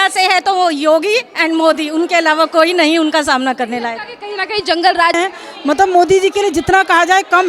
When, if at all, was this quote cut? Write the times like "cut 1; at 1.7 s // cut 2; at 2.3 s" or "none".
cut 1; at 5.2 s